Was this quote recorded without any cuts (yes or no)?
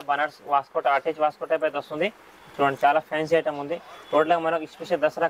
yes